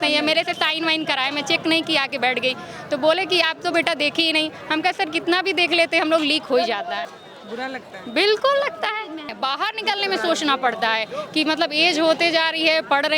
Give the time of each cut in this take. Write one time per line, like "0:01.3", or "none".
0:07.1
0:09.3